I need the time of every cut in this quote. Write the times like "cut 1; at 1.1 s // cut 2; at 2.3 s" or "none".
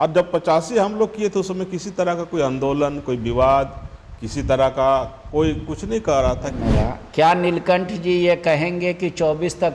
cut 1; at 6.6 s